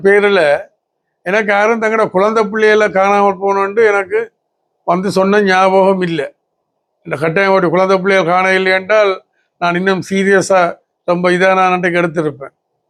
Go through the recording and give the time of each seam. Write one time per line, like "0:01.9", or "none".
none